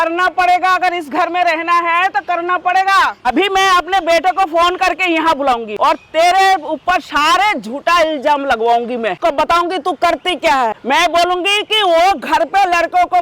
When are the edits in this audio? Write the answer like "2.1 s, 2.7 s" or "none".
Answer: 3.2 s, 5.7 s, 9.2 s, 10.8 s